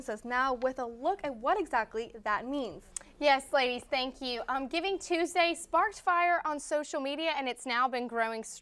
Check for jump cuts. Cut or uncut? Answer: uncut